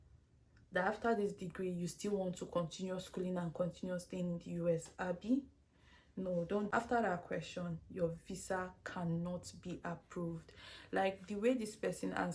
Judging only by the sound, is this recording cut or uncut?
cut